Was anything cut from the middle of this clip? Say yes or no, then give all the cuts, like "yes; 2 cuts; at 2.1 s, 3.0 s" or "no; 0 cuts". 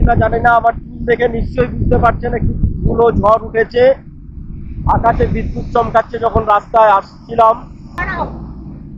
no; 0 cuts